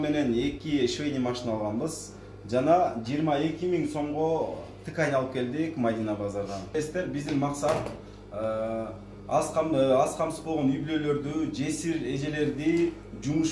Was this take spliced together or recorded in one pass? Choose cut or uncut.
cut